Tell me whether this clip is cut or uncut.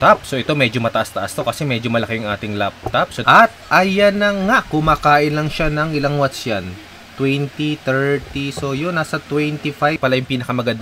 cut